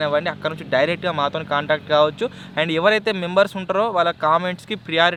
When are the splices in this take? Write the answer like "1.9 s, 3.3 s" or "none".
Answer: none